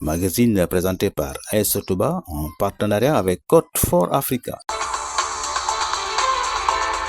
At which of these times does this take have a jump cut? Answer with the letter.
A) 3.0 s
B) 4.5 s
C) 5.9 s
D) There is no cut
B